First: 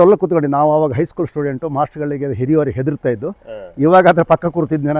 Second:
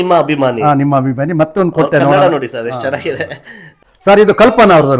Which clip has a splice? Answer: second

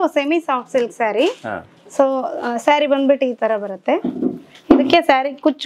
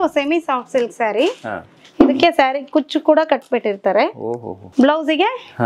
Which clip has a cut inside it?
second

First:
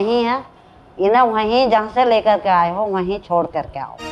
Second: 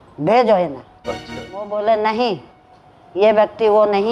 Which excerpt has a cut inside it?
second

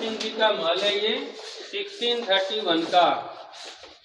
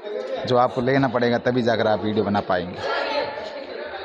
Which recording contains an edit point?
second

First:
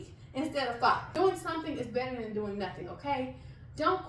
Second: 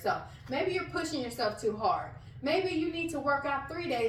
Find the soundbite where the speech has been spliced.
first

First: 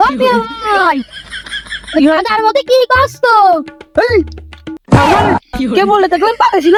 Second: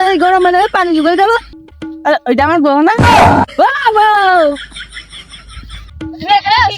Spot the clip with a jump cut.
second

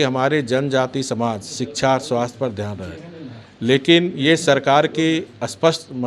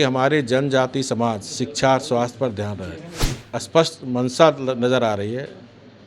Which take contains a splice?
second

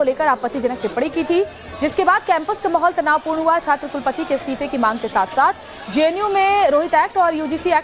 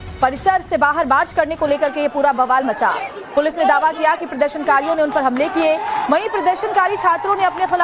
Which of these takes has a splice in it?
second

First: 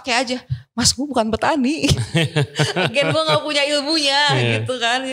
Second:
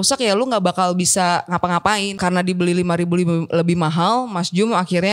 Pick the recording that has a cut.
second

